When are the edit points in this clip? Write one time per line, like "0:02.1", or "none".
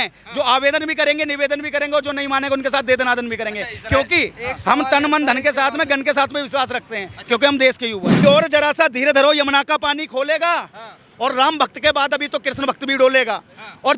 0:08.1